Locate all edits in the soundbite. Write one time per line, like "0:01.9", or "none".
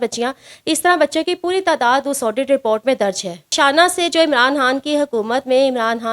0:03.5